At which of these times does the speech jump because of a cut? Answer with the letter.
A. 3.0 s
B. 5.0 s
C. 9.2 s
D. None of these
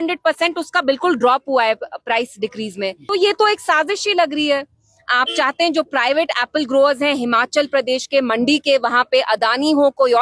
A